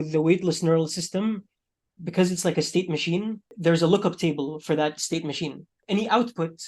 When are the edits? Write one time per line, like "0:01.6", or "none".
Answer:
0:03.4
0:05.7